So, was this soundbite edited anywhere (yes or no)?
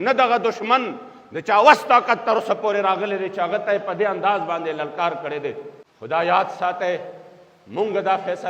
no